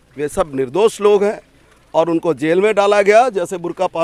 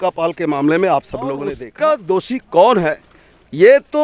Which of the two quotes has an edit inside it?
second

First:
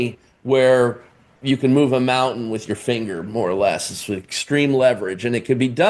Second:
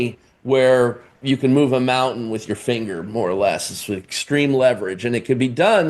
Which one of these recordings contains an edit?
second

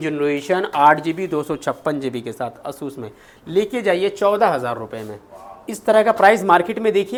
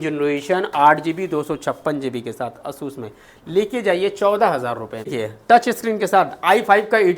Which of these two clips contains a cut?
second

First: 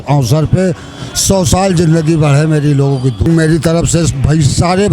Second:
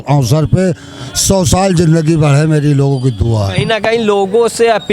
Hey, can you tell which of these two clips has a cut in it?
first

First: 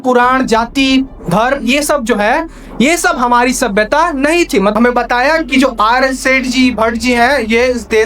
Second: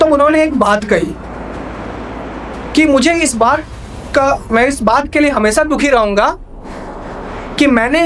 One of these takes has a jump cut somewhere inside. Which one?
first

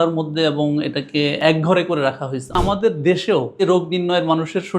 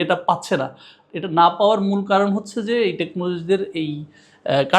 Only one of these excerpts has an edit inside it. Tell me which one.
first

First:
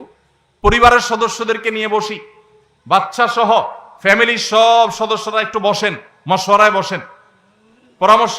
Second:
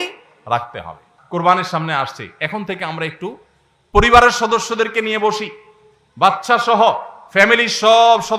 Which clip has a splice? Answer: second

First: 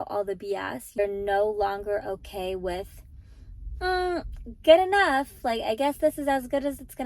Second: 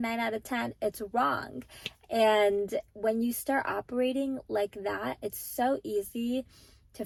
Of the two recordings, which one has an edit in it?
first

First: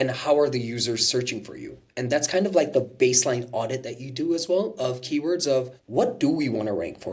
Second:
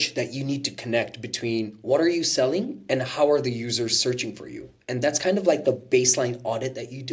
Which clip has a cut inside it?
first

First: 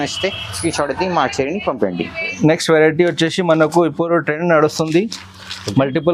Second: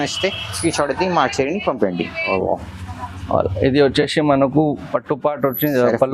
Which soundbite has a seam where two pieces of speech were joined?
second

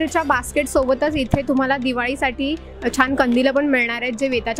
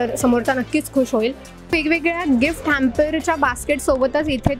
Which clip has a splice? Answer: second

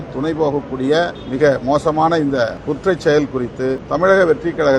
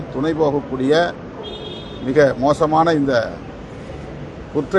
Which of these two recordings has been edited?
first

